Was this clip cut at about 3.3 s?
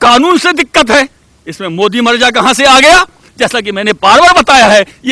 yes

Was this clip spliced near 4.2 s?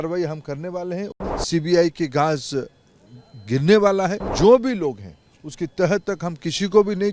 yes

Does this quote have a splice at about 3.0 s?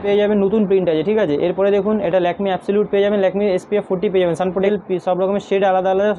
no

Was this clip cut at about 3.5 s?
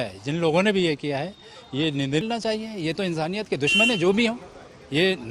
no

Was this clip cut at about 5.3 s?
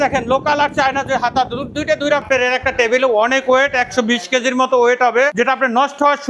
yes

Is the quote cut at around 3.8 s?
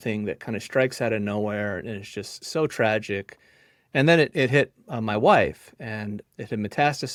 no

